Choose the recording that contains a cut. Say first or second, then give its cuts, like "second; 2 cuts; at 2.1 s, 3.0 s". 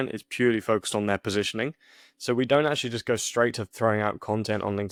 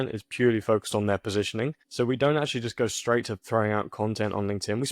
second; 1 cut; at 1.8 s